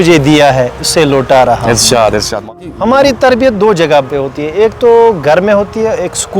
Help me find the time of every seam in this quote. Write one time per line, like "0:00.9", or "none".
0:02.4